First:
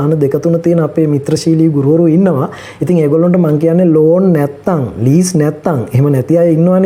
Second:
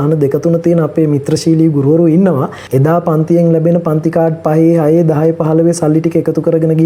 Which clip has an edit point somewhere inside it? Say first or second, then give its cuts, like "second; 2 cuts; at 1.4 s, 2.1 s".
second; 1 cut; at 2.6 s